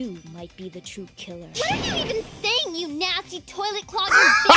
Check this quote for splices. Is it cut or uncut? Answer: cut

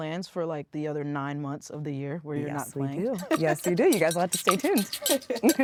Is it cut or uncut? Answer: uncut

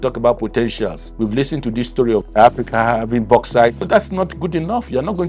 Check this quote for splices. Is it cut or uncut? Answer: cut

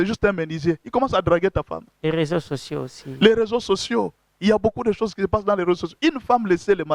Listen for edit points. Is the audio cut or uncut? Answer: uncut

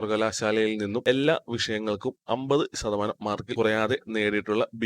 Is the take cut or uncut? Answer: uncut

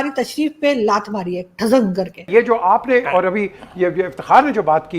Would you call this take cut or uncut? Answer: cut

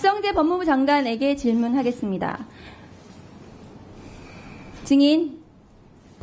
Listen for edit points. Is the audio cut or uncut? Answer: uncut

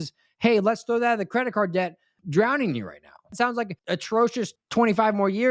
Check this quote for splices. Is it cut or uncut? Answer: cut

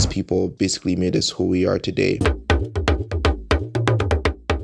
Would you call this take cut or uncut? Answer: cut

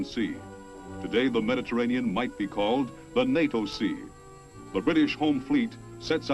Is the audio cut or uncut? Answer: uncut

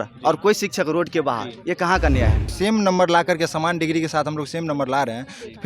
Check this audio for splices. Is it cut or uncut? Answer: cut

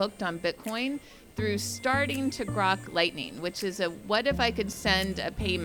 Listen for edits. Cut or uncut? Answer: uncut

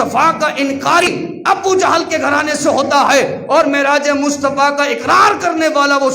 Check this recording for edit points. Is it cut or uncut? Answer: cut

